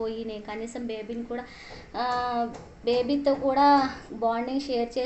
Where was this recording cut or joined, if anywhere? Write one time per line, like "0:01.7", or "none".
none